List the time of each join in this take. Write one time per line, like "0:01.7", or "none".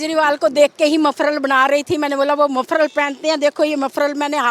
none